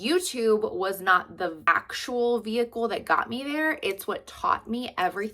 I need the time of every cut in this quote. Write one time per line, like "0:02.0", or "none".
0:01.7